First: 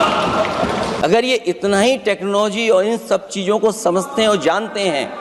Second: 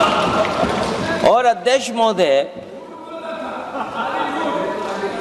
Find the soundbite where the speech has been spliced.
first; 1 cut; at 1.0 s

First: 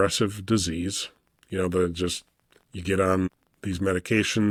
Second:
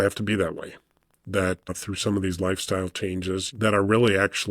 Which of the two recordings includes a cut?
second; 1 cut; at 3.5 s

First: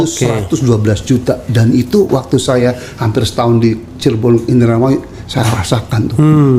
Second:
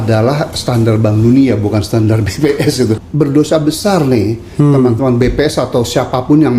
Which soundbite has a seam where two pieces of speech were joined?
second; 1 cut; at 2.9 s

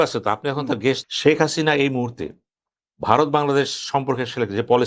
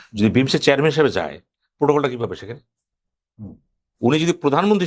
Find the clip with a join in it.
first; 1 cut; at 1.1 s

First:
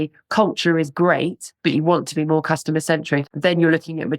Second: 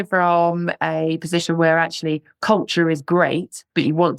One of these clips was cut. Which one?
first; 1 cut; at 3.3 s

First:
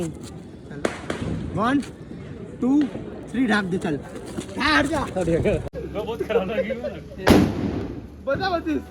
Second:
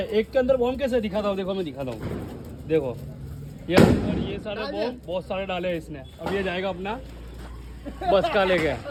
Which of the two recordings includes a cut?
first; 1 cut; at 5.7 s

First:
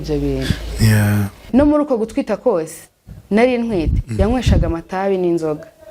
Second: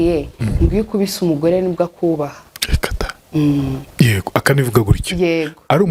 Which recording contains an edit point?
first; 1 cut; at 1.4 s

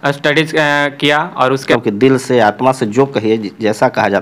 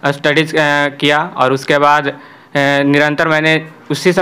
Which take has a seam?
first; 1 cut; at 1.7 s

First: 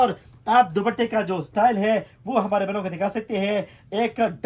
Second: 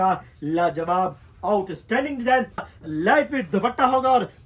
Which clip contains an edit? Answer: second; 1 cut; at 2.7 s

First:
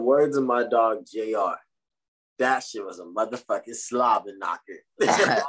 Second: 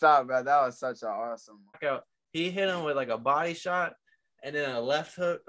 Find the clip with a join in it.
second; 1 cut; at 1.7 s

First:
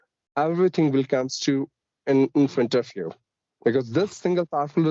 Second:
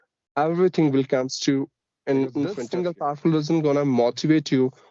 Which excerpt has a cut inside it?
second; 1 cut; at 2.6 s

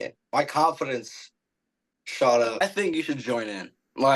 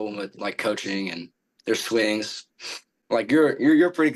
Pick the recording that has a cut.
first; 1 cut; at 2.6 s

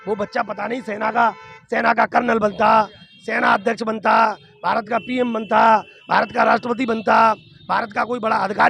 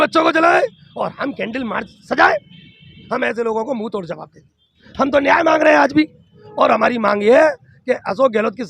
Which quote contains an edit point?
second; 3 cuts; at 3.0 s, 4.8 s, 6.4 s

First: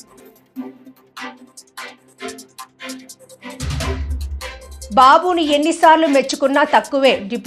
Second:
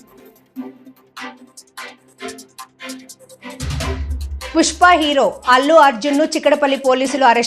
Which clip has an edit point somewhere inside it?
second; 1 cut; at 4.5 s

